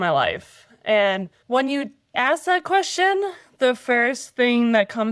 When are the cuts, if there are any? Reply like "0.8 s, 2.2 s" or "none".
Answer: 1.4 s, 2.1 s